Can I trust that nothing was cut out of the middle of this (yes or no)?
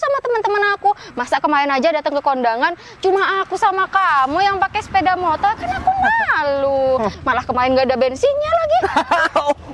no